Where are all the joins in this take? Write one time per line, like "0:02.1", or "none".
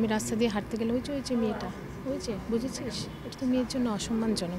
none